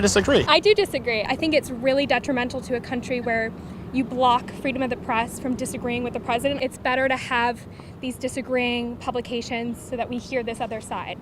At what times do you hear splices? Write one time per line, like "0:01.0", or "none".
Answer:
0:01.3
0:06.6